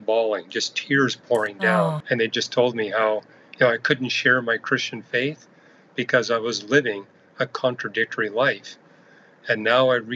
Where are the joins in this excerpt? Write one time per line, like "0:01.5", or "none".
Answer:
0:02.0